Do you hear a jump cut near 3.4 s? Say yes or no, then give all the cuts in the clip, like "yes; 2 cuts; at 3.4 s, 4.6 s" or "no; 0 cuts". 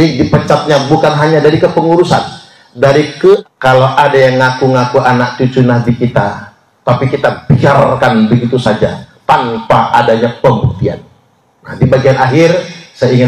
yes; 1 cut; at 3.4 s